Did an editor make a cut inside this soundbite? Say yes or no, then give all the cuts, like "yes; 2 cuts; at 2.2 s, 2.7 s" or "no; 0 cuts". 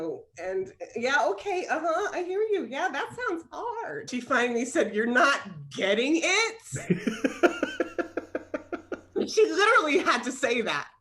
yes; 1 cut; at 4.1 s